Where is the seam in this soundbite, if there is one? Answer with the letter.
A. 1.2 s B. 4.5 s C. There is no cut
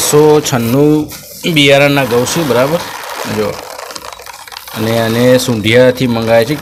C